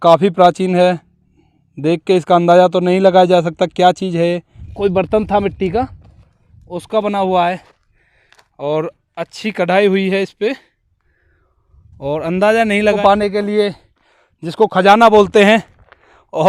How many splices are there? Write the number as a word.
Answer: two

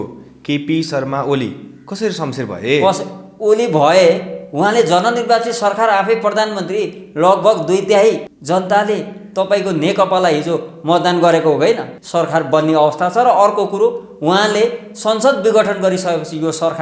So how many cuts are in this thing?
two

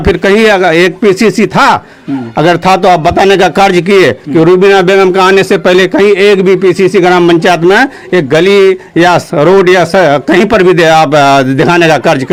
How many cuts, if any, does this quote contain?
zero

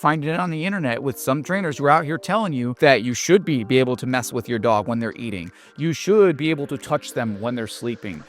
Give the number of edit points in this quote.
one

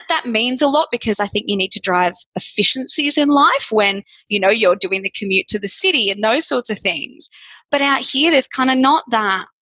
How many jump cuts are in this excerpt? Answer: zero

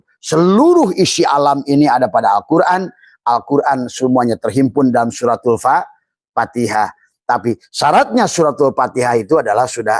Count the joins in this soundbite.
zero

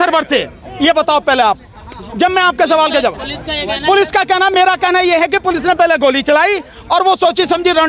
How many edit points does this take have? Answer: zero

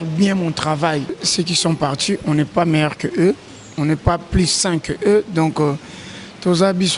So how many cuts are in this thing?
one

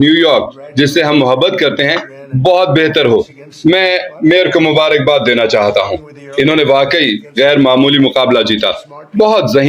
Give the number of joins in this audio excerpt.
one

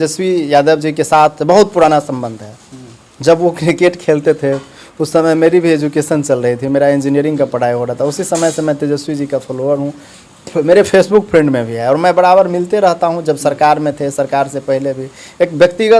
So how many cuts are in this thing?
zero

